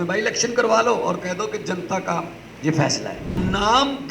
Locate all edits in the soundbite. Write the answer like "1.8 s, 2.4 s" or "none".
2.4 s, 3.3 s